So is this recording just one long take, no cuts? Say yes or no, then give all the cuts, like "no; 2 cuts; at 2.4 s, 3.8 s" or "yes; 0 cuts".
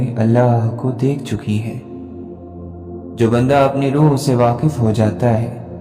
yes; 0 cuts